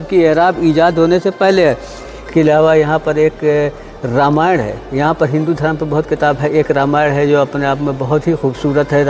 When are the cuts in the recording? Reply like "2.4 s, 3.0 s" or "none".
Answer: 2.1 s